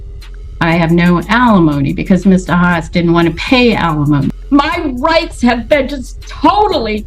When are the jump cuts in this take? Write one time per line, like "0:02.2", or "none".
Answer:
0:04.4